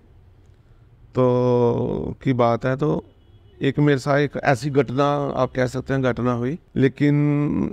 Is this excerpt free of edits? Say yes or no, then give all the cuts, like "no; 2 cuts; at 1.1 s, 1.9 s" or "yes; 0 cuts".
no; 1 cut; at 6.6 s